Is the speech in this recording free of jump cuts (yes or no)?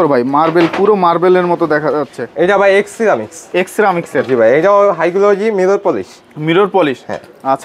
yes